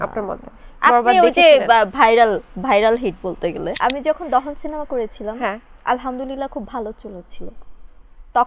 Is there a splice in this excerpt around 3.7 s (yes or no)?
yes